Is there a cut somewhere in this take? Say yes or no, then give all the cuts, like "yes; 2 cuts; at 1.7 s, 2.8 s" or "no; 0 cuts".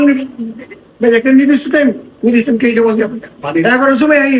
no; 0 cuts